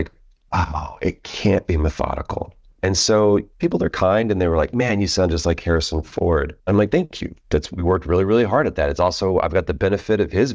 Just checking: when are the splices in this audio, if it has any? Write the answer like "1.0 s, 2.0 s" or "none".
2.6 s, 3.5 s, 6.5 s